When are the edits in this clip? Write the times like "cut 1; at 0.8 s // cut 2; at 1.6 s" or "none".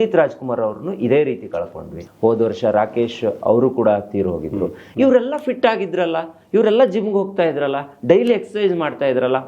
cut 1; at 2.0 s // cut 2; at 4.8 s